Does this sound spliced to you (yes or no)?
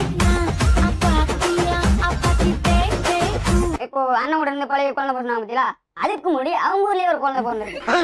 yes